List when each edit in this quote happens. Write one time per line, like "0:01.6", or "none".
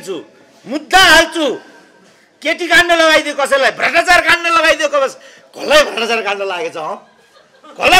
none